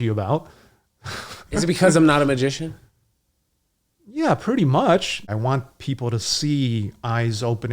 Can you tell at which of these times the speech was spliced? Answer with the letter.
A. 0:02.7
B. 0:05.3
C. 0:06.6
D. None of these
B